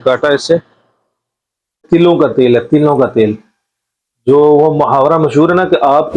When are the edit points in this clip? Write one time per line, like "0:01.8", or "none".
0:01.8